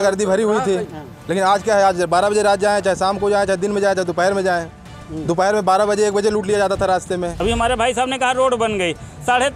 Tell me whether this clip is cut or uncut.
cut